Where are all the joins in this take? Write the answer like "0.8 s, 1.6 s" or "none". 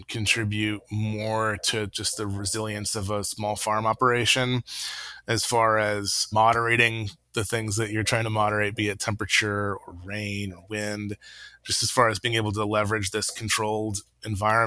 6.2 s